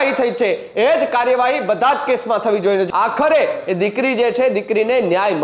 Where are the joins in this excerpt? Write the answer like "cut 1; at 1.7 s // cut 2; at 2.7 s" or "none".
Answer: cut 1; at 2.9 s